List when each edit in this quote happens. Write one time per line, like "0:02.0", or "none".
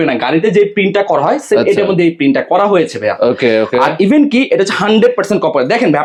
none